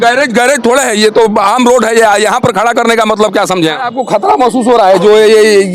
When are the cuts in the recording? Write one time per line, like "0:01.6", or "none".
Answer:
0:03.9